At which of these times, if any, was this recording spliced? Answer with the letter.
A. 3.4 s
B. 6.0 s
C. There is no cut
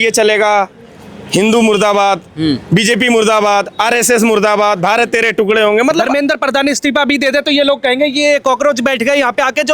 B